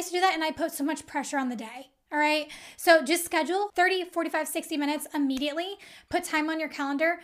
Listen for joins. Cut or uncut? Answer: cut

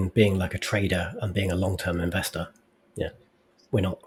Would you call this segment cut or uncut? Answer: uncut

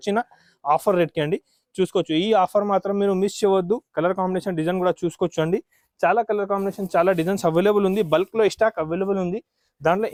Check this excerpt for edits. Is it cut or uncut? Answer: uncut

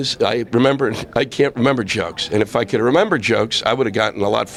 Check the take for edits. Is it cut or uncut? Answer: uncut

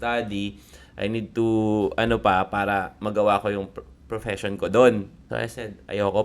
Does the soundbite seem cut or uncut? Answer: cut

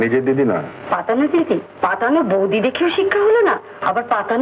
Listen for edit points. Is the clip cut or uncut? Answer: cut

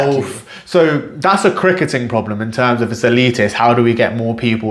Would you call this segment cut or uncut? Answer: uncut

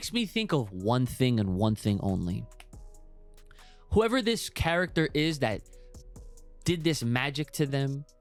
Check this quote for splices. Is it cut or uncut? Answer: uncut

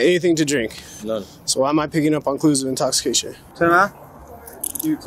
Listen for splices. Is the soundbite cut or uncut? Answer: cut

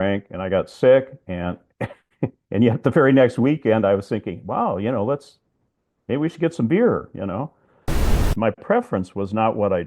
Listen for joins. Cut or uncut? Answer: cut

